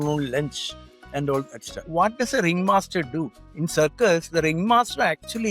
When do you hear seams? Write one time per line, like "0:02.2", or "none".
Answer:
0:01.8
0:03.4